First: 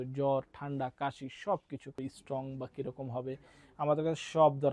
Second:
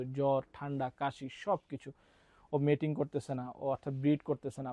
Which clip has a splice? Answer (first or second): first